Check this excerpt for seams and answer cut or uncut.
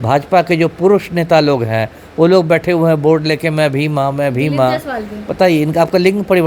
uncut